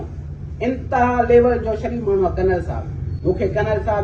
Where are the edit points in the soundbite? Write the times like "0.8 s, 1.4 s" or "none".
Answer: none

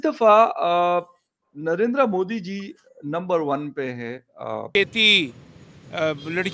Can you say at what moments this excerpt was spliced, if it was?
4.7 s

